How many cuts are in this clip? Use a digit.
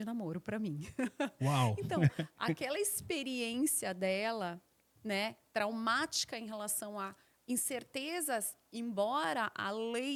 0